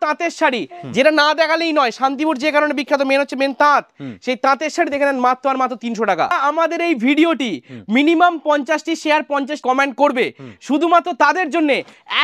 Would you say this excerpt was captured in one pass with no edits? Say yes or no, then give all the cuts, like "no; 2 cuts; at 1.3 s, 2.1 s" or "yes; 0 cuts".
no; 2 cuts; at 6.3 s, 9.6 s